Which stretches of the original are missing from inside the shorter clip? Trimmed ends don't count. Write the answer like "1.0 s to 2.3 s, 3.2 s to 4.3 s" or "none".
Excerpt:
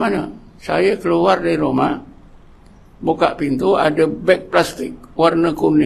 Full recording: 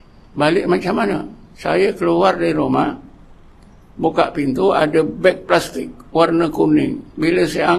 none